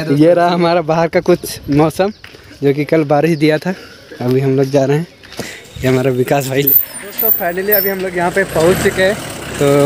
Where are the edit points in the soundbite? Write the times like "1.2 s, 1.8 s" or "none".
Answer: 6.7 s